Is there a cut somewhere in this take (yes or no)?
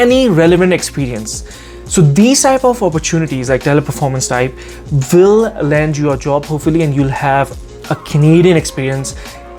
no